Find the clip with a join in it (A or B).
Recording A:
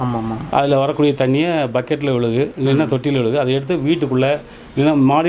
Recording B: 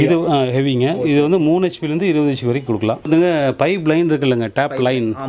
B